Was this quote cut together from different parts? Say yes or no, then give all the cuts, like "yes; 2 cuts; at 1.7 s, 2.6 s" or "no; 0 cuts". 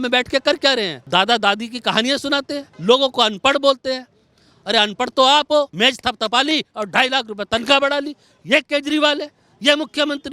yes; 3 cuts; at 1.0 s, 2.6 s, 5.7 s